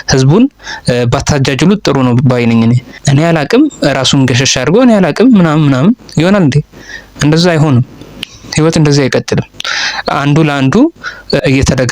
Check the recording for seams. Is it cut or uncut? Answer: cut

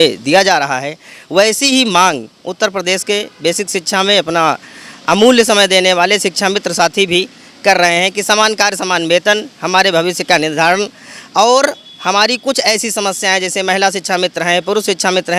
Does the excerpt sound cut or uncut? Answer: uncut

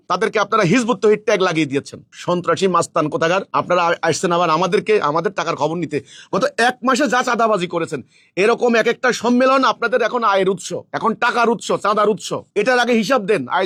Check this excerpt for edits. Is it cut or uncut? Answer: uncut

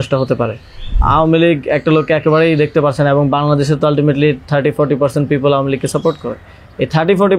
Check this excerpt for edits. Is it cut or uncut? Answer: cut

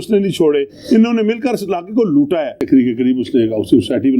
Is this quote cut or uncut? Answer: cut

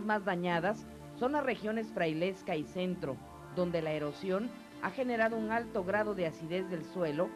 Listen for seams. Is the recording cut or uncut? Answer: uncut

